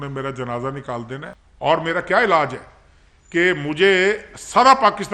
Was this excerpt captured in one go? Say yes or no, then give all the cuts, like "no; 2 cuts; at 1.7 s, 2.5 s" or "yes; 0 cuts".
no; 1 cut; at 1.3 s